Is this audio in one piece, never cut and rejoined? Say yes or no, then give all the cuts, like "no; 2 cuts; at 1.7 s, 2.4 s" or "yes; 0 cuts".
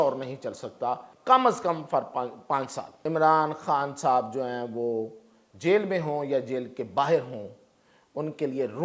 no; 2 cuts; at 1.1 s, 2.9 s